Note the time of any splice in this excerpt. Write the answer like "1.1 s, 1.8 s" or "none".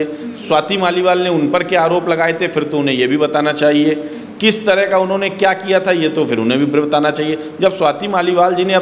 none